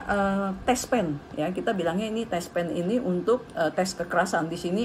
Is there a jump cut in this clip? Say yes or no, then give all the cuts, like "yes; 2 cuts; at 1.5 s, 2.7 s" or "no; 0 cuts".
no; 0 cuts